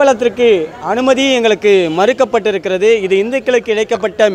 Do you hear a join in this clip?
no; 0 cuts

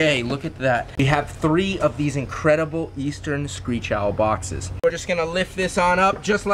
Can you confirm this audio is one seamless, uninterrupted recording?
no; 2 cuts; at 1.0 s, 5.1 s

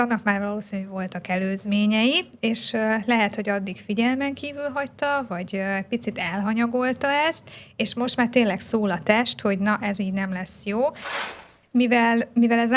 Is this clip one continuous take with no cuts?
no; 1 cut; at 11.1 s

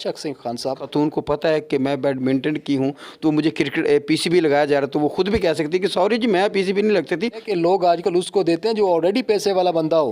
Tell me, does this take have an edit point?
yes; 2 cuts; at 0.8 s, 7.4 s

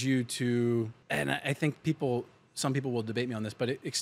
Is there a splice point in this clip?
yes; 1 cut; at 1.0 s

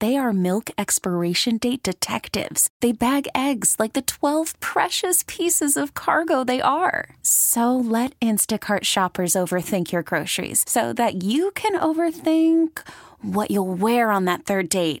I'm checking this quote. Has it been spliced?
no; 0 cuts

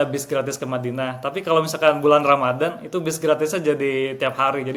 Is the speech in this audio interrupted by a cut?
no; 0 cuts

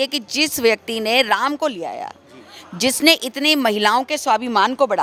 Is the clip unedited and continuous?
yes; 0 cuts

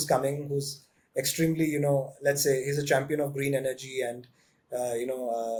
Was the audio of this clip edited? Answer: no; 0 cuts

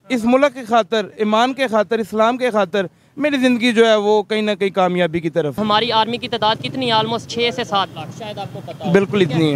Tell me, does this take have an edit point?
yes; 1 cut; at 5.6 s

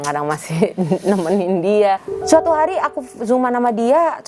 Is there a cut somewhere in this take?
yes; 1 cut; at 2.1 s

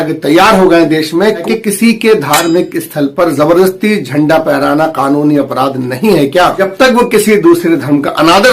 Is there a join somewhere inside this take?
yes; 1 cut; at 1.3 s

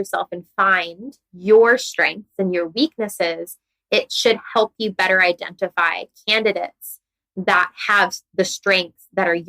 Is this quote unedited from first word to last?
no; 1 cut; at 1.3 s

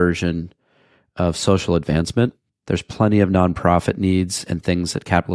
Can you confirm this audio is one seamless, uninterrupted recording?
yes; 0 cuts

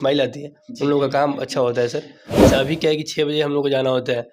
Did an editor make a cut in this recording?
yes; 1 cut; at 2.4 s

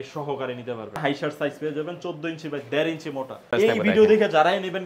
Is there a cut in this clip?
yes; 2 cuts; at 1.0 s, 3.5 s

